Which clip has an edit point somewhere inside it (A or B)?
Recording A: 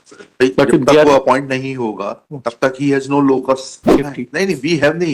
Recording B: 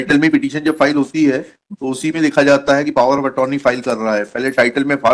A